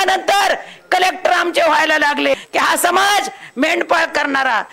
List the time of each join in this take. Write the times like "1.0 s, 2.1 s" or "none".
2.4 s